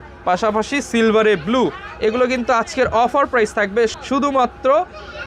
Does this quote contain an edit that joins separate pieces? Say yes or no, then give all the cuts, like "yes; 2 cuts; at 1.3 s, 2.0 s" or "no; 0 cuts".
no; 0 cuts